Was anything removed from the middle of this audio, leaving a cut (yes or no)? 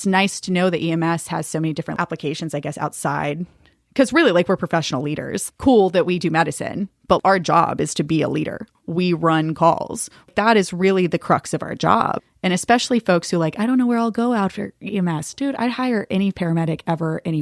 yes